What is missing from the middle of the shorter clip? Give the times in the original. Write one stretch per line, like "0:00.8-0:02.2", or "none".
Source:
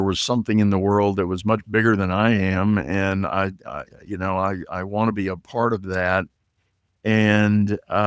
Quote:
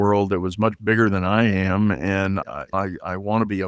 0:03.4-0:04.2